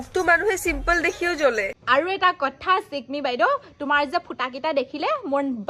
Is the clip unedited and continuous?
no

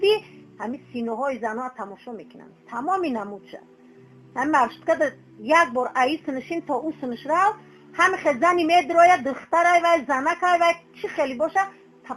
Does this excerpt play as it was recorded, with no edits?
no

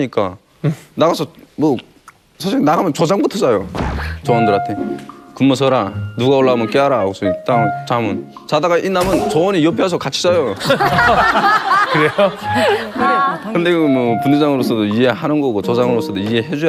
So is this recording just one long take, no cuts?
yes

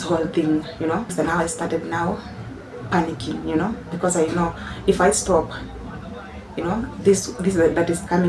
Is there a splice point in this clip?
yes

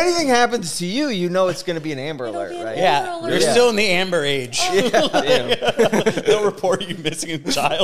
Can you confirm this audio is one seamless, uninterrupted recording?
yes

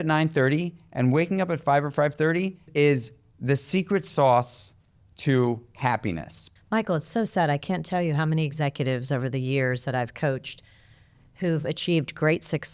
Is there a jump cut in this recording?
yes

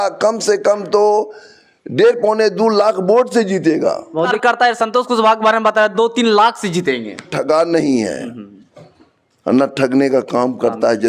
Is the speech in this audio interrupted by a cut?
yes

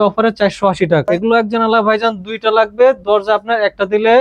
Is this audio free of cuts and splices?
no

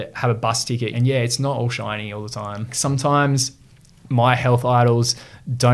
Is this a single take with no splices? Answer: no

